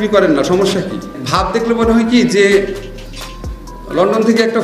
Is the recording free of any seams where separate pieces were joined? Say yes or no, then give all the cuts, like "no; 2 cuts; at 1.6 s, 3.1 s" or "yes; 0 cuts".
no; 1 cut; at 1.2 s